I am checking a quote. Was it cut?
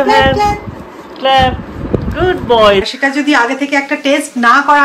yes; 1 cut; at 2.9 s

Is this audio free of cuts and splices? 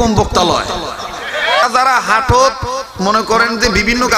no; 1 cut; at 1.6 s

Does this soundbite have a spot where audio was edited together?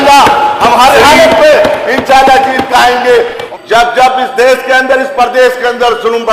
yes; 1 cut; at 3.4 s

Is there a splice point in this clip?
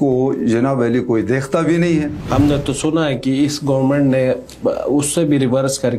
yes; 1 cut; at 2.2 s

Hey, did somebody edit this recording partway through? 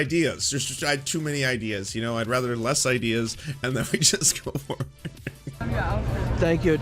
yes; 1 cut; at 5.6 s

